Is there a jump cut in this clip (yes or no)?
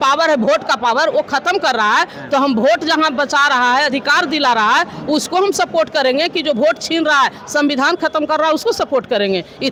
no